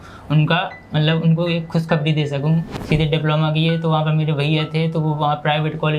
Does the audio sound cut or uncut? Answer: cut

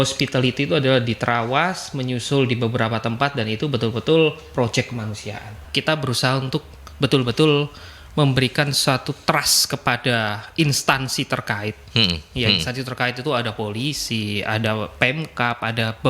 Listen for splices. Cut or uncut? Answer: cut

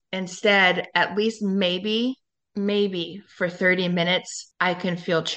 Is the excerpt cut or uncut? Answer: cut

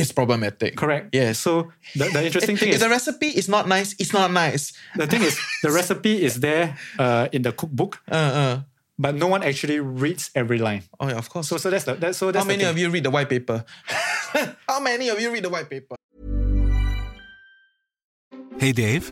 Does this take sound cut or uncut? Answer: cut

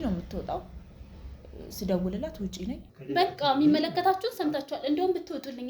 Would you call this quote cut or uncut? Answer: cut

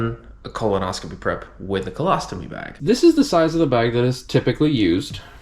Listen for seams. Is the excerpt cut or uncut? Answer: cut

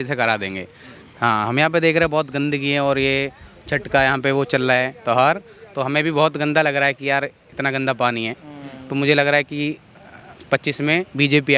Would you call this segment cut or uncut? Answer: uncut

